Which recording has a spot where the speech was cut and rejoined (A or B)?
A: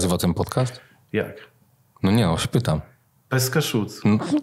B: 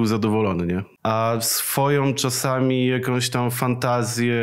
B